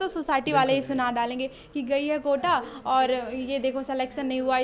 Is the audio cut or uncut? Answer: uncut